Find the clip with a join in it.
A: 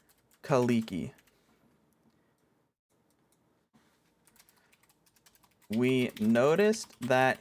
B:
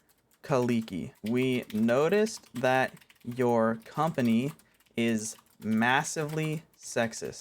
B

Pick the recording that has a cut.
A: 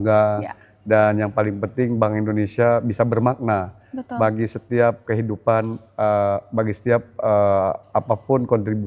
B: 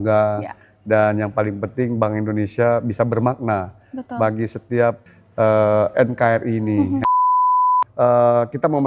B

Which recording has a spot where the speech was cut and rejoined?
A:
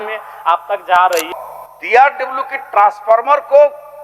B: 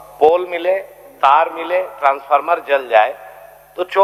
A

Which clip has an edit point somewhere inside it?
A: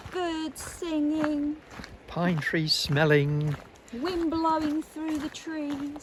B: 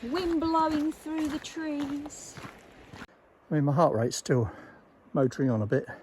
B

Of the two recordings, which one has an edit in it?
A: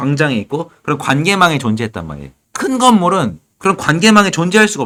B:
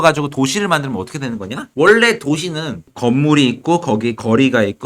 B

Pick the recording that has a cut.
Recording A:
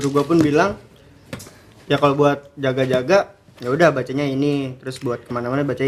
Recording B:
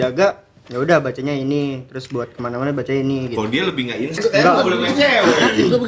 B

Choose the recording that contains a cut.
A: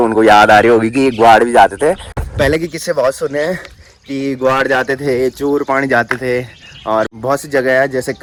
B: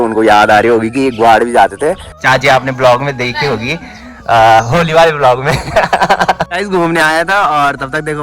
B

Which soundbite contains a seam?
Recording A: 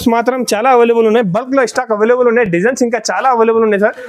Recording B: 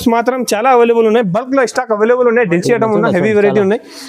B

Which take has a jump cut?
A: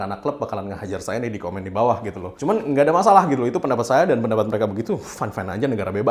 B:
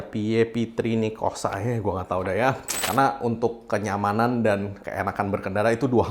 B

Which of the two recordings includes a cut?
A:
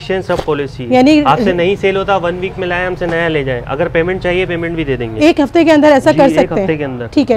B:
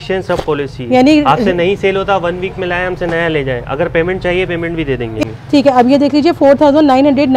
B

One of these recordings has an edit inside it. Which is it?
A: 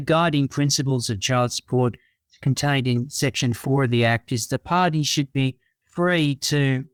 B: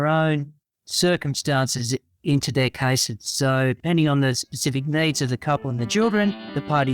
B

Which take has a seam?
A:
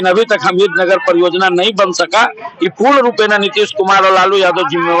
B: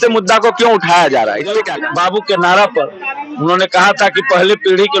B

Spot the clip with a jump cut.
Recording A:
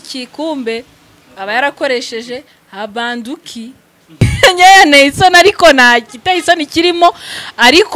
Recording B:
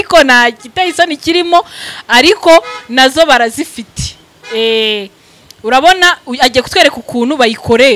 A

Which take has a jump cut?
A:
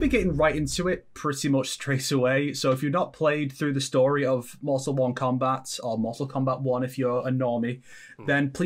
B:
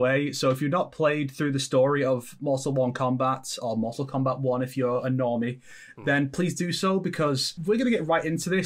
B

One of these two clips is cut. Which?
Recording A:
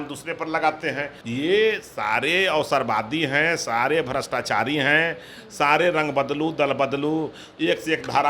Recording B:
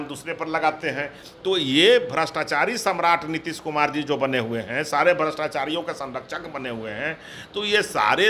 A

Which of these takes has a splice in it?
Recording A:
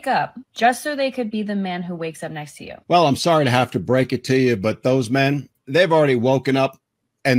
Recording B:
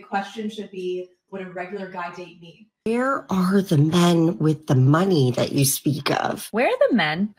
B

